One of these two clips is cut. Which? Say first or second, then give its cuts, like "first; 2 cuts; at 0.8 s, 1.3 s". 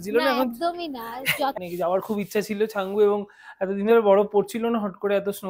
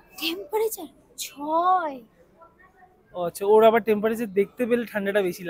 first; 1 cut; at 1.5 s